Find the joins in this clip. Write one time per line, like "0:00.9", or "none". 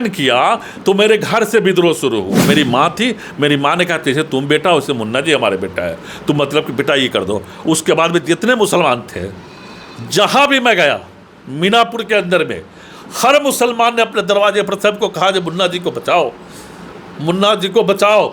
0:02.5